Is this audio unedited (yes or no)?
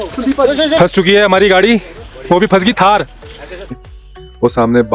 no